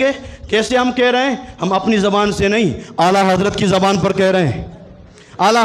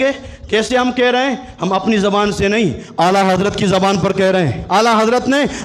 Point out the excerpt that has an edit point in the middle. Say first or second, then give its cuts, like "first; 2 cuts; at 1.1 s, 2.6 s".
second; 1 cut; at 4.6 s